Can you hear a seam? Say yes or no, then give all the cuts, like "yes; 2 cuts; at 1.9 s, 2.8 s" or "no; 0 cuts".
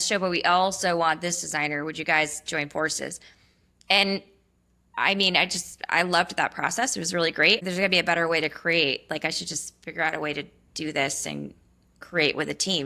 yes; 1 cut; at 7.6 s